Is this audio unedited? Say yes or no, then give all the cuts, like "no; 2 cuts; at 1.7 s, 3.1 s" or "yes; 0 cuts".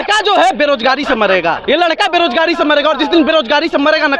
no; 1 cut; at 1.6 s